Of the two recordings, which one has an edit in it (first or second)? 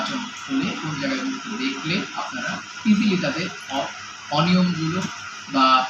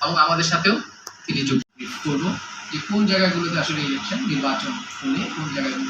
second